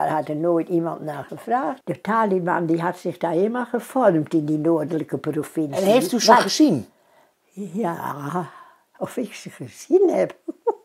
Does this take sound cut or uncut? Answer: cut